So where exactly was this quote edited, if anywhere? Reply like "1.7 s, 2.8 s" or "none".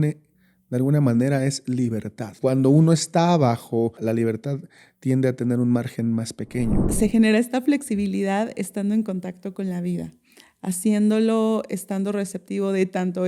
2.3 s, 4.0 s, 6.9 s